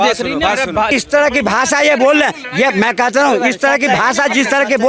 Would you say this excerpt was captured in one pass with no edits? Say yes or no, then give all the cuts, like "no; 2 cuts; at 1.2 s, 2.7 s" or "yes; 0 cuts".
no; 1 cut; at 0.9 s